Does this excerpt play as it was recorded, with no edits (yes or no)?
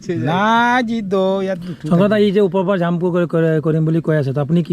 yes